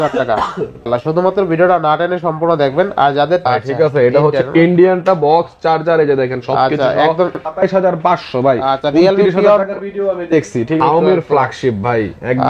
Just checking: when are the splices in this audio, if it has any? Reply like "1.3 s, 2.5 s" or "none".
0.9 s, 3.4 s, 7.3 s, 10.8 s